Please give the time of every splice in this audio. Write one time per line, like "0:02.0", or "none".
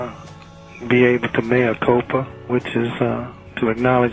0:02.4